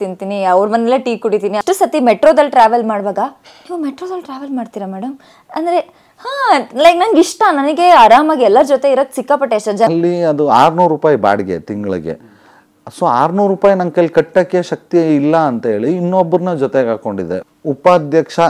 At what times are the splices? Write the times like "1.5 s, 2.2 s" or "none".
1.6 s, 9.9 s, 17.5 s